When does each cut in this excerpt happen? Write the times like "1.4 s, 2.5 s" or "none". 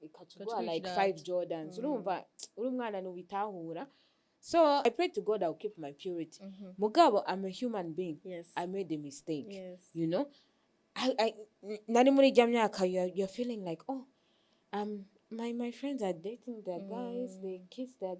4.8 s